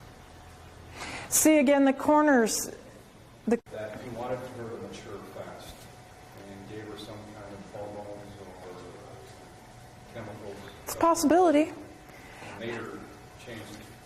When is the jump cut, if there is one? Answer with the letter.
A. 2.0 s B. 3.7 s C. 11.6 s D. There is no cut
D